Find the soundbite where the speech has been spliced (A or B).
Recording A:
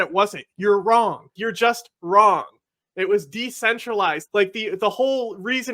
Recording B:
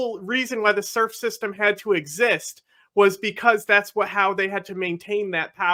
A